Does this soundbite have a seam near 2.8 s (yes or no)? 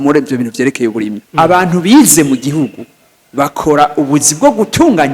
no